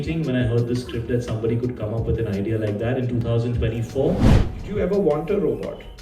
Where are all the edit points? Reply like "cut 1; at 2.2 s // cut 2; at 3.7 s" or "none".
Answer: cut 1; at 4.4 s